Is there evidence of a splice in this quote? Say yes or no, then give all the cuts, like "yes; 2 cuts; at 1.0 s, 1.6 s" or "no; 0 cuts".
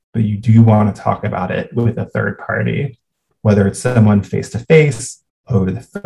no; 0 cuts